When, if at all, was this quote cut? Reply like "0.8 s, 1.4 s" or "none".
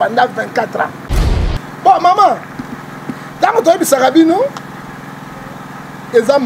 1.1 s